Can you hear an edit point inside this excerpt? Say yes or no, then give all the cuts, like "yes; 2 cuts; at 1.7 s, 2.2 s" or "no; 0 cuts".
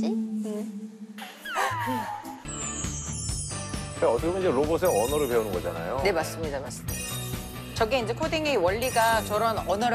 yes; 1 cut; at 2.4 s